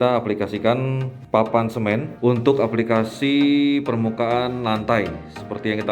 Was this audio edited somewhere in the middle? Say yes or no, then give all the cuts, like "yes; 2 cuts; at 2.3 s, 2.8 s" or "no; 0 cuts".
yes; 2 cuts; at 1.1 s, 2.1 s